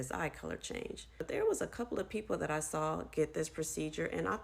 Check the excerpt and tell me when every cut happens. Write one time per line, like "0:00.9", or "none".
0:01.2